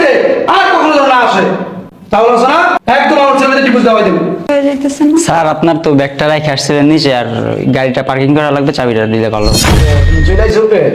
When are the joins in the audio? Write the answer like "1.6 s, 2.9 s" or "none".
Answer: 2.8 s, 4.5 s